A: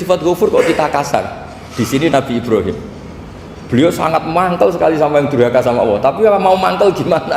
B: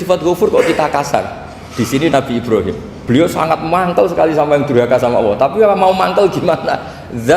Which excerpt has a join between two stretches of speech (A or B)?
B